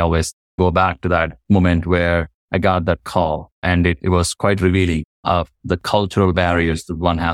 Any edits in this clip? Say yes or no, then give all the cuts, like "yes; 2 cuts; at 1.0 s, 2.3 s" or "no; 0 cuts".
yes; 3 cuts; at 2.4 s, 3.5 s, 5.1 s